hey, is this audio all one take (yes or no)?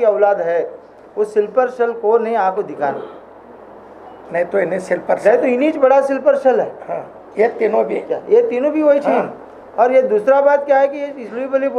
yes